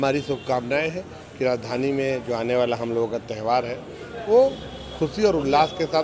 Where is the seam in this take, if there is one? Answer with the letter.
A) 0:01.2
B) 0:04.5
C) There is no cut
C